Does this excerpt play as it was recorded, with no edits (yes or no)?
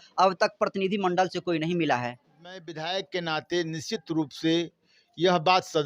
no